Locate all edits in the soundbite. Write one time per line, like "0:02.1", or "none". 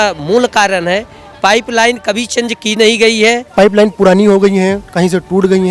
0:03.5